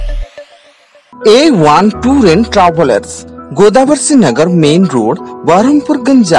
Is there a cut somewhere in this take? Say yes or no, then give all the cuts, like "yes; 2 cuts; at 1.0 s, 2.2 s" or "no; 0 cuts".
yes; 1 cut; at 1.1 s